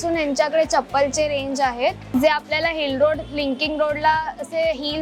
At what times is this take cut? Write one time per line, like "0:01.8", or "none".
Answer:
0:02.1